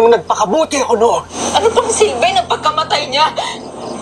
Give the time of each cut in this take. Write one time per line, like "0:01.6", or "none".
0:01.3

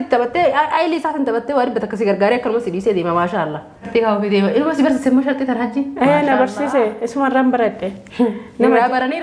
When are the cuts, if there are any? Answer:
0:03.9

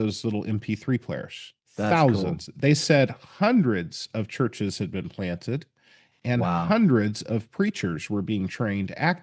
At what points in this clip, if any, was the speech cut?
none

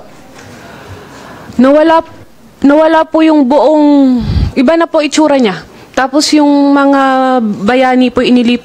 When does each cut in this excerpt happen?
none

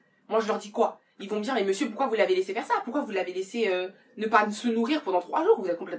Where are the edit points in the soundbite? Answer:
none

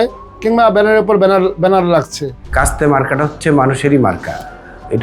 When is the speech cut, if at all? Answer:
0:02.5

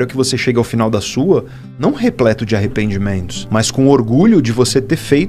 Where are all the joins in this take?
0:03.3

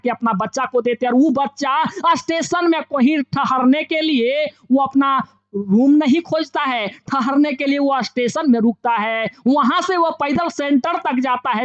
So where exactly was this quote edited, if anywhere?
none

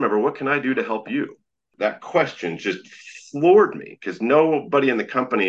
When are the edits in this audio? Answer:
none

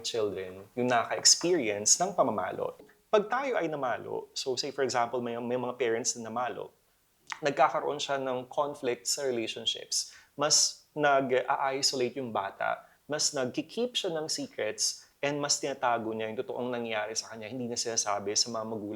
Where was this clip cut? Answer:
0:02.8

